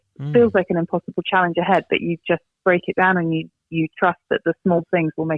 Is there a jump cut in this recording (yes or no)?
no